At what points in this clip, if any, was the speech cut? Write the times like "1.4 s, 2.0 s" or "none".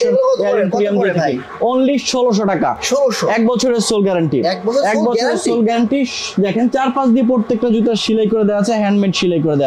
none